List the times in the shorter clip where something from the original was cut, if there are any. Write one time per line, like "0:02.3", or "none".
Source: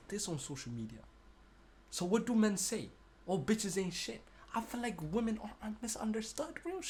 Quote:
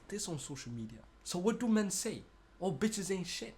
0:01.1